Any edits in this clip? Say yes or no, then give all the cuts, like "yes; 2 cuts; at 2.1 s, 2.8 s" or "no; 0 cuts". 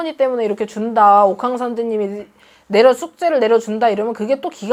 no; 0 cuts